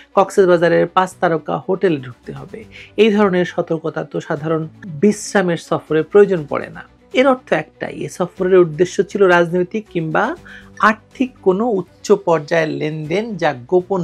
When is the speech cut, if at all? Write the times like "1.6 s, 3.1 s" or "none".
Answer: none